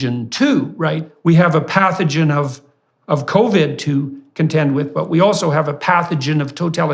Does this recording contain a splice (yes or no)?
yes